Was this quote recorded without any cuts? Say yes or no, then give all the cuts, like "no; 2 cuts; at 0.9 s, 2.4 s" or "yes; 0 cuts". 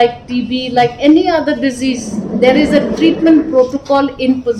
yes; 0 cuts